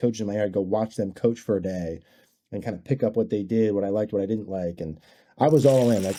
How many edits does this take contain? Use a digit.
0